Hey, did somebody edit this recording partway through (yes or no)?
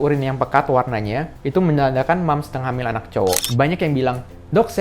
yes